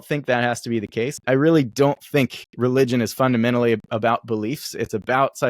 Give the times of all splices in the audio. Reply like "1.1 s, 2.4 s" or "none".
1.2 s